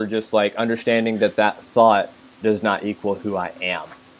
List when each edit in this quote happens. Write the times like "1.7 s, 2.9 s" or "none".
none